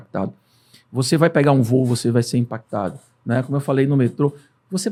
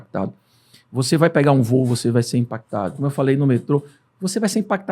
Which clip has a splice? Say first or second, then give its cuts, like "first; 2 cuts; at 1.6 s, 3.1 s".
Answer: second; 1 cut; at 3.0 s